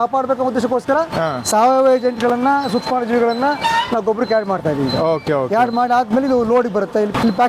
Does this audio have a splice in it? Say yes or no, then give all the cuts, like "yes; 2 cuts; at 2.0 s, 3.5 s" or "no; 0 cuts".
no; 0 cuts